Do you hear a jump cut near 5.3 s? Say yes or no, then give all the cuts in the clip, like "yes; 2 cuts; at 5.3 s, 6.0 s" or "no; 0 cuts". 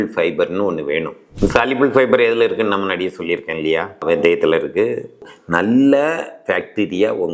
yes; 1 cut; at 5.3 s